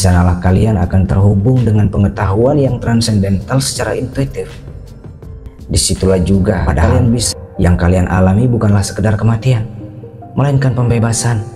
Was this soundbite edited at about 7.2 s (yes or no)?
yes